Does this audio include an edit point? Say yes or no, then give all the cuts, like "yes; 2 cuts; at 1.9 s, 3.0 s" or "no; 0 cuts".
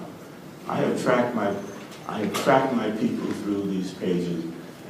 no; 0 cuts